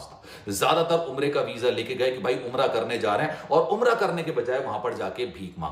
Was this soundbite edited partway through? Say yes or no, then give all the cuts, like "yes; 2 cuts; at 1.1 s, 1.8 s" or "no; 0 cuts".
no; 0 cuts